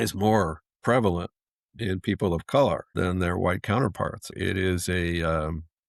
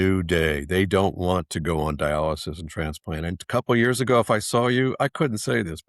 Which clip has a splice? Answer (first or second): first